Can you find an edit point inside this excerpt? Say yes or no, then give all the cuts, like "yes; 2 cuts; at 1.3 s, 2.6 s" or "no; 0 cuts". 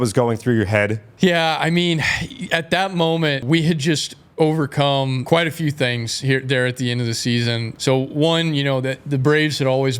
yes; 3 cuts; at 3.4 s, 5.2 s, 7.7 s